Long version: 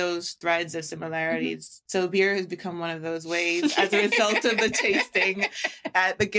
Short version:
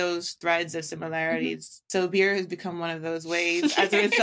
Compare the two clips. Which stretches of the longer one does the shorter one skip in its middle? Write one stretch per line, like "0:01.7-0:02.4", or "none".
none